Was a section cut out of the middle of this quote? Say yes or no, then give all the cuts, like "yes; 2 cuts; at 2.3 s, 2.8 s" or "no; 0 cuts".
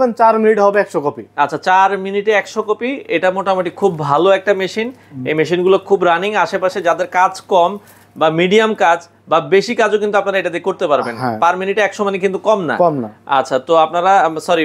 no; 0 cuts